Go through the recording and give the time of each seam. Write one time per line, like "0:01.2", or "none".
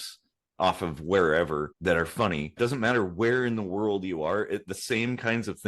0:01.7
0:02.6